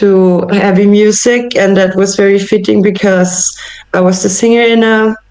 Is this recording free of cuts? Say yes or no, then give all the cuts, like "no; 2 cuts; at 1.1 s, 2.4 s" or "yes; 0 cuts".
yes; 0 cuts